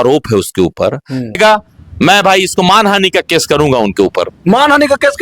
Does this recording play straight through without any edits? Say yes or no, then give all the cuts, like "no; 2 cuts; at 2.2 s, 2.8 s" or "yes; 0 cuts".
no; 1 cut; at 1.4 s